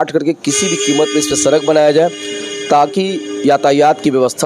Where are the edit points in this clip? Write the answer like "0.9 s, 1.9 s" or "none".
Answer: none

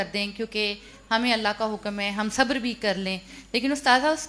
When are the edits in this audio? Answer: none

